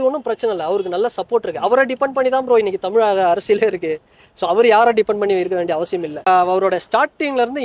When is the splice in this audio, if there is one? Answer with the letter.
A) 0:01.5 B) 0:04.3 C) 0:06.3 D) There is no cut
C